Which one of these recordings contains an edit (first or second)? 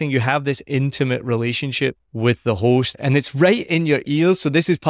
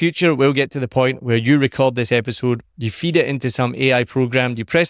first